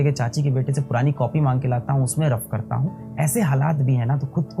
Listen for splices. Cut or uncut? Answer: uncut